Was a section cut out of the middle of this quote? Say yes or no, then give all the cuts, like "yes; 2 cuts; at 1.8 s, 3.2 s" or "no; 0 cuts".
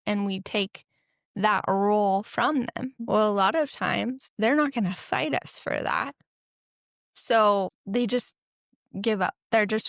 yes; 3 cuts; at 2.9 s, 4.2 s, 7.8 s